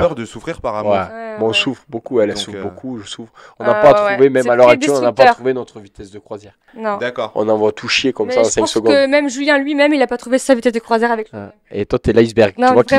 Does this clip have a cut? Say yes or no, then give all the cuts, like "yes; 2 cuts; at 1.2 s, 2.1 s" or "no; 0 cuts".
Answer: no; 0 cuts